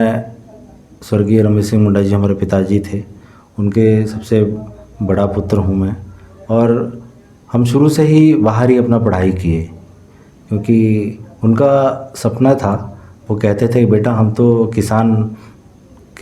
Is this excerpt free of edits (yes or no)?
yes